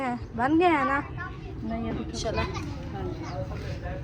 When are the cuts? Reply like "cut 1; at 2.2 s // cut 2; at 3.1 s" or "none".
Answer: cut 1; at 2.2 s